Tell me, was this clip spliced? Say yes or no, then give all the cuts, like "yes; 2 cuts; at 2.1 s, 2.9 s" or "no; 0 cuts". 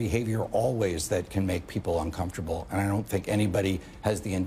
no; 0 cuts